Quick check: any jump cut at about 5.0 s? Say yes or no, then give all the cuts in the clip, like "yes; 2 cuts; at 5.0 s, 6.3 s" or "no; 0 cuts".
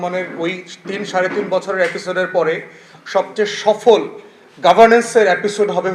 no; 0 cuts